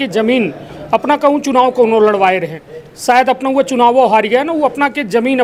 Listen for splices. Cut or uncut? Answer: uncut